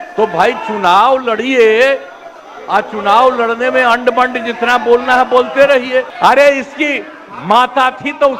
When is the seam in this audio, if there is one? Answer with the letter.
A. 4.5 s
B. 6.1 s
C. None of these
B